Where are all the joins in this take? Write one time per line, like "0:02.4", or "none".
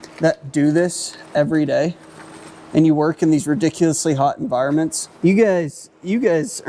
0:05.0